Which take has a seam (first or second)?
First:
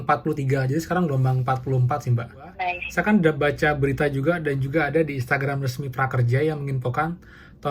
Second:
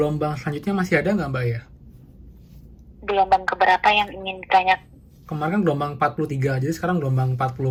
first